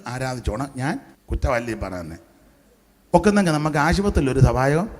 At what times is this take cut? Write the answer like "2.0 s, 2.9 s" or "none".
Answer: 1.1 s